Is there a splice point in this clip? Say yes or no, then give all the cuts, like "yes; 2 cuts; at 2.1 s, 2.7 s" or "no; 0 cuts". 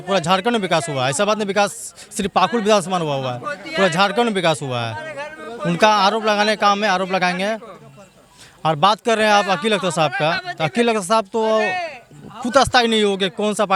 no; 0 cuts